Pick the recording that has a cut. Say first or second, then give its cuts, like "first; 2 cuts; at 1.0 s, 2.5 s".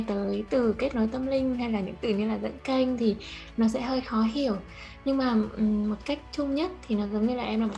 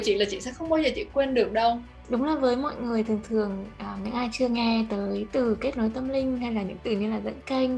second; 1 cut; at 2.0 s